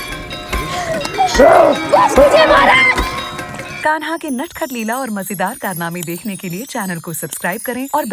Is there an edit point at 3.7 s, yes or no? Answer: yes